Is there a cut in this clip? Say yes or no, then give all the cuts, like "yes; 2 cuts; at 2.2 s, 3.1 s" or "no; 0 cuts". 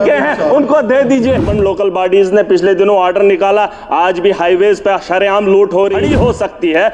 yes; 2 cuts; at 1.5 s, 6.0 s